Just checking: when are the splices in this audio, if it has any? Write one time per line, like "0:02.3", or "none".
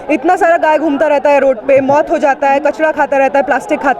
none

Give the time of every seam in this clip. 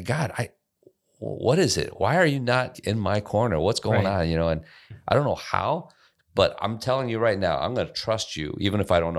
0:02.8
0:04.9

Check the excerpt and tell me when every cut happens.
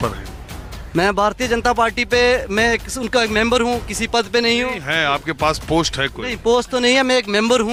none

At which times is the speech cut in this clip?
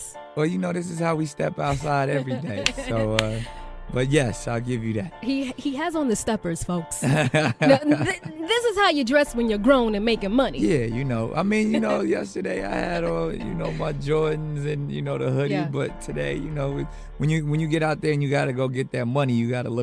none

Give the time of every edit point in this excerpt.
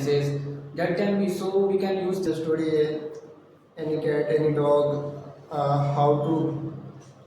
0:02.3

